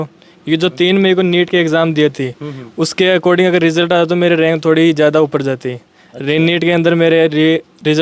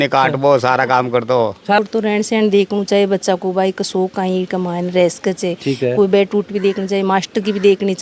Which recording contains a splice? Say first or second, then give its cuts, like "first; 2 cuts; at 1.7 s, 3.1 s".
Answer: second; 1 cut; at 1.8 s